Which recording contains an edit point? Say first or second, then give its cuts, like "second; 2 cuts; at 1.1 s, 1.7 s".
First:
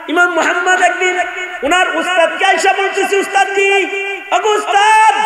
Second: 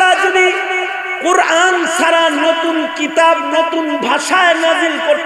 first; 2 cuts; at 1.4 s, 4.1 s